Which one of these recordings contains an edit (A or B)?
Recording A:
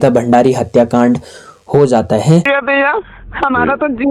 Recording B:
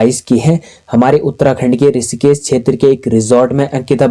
A